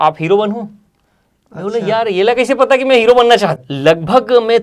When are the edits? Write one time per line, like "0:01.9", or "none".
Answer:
0:03.7